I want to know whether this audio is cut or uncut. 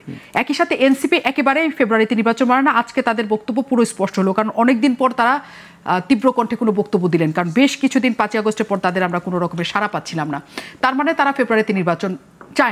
uncut